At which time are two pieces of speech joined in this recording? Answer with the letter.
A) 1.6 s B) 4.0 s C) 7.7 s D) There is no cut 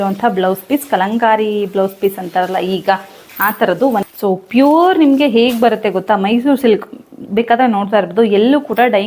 B